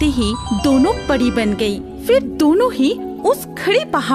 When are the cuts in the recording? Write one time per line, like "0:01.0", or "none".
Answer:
none